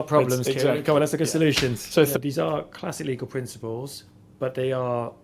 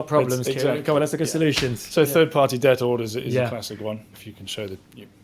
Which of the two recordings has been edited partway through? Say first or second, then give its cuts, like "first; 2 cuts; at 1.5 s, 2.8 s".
first; 1 cut; at 2.1 s